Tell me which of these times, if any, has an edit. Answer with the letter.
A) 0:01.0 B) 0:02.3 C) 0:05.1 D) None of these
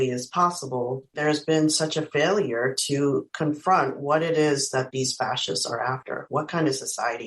A